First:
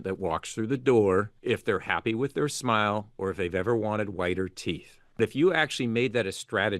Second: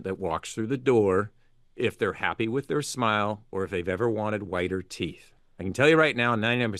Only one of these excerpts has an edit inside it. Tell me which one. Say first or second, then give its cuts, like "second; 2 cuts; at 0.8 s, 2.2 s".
first; 2 cuts; at 1.3 s, 5.2 s